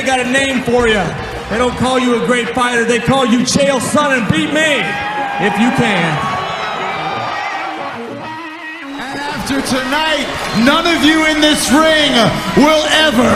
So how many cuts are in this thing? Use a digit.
0